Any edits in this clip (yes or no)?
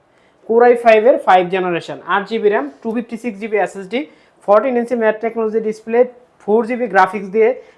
no